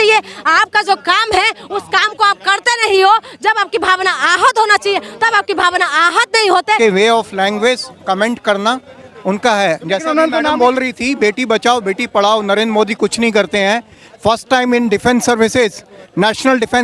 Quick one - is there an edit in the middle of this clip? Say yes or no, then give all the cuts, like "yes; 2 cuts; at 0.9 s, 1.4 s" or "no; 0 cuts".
yes; 1 cut; at 6.8 s